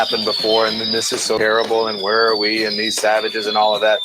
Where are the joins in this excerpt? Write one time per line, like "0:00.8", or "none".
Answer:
0:01.4